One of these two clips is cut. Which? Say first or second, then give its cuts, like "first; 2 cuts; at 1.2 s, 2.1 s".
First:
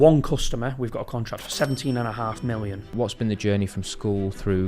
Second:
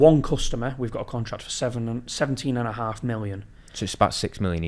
first; 2 cuts; at 1.5 s, 2.9 s